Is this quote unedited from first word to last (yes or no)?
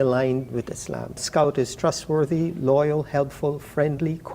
no